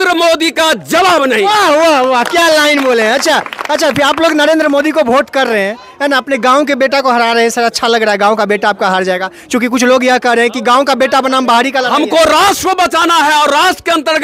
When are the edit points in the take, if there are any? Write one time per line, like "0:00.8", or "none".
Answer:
none